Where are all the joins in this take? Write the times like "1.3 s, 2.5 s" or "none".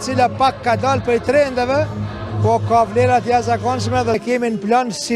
4.2 s